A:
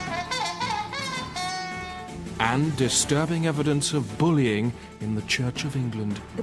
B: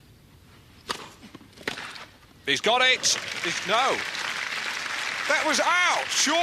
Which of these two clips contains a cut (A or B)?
B